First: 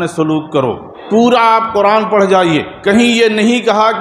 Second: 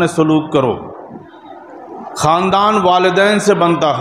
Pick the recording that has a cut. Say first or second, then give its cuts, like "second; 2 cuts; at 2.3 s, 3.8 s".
first; 2 cuts; at 1.0 s, 2.7 s